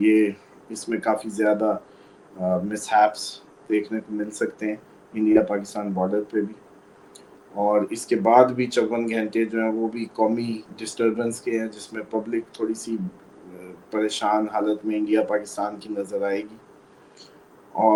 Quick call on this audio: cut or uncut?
uncut